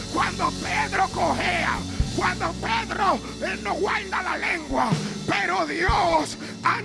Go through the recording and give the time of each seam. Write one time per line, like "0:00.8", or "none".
none